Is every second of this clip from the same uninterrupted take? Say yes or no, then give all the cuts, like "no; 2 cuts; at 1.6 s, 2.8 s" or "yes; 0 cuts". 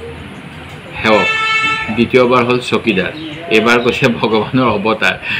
yes; 0 cuts